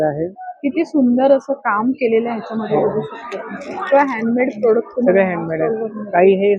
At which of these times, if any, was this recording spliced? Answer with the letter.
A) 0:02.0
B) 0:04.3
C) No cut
C